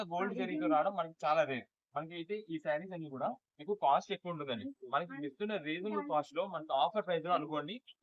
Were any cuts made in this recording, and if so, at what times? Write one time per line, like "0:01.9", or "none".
none